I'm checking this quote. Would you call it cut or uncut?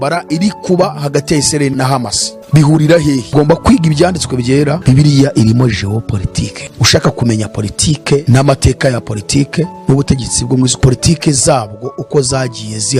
cut